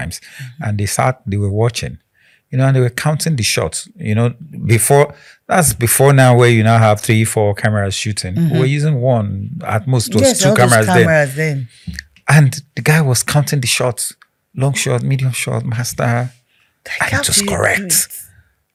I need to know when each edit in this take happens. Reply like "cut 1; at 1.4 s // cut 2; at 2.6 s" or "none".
none